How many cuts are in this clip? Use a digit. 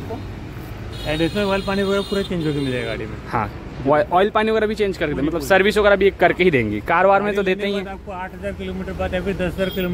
0